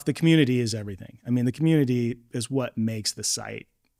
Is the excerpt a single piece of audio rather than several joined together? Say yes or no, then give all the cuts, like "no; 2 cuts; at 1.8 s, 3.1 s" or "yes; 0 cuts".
yes; 0 cuts